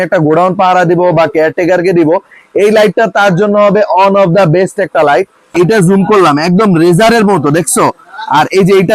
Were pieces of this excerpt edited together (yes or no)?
yes